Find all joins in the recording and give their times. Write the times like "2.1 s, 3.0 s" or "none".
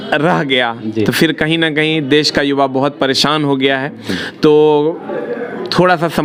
none